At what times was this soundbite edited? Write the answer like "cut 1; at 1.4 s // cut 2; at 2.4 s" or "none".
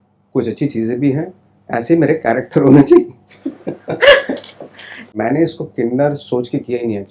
cut 1; at 5.1 s